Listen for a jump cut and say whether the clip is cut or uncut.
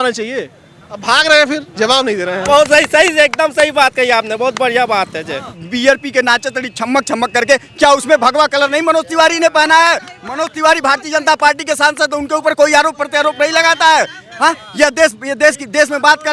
cut